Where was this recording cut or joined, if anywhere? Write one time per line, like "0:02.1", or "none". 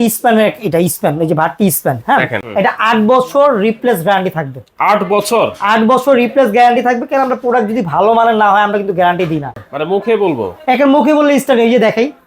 0:02.4
0:09.6